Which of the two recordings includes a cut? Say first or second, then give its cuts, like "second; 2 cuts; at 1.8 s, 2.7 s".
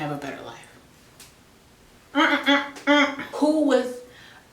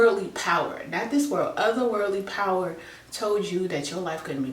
first; 1 cut; at 3.2 s